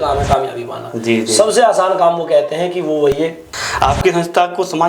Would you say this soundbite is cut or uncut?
cut